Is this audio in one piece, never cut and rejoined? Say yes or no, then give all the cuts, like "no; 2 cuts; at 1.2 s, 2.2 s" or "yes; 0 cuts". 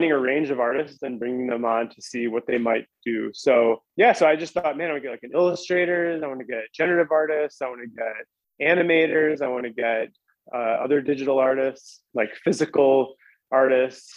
no; 2 cuts; at 3.9 s, 12.0 s